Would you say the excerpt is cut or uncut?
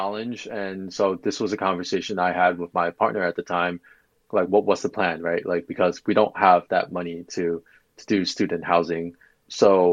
uncut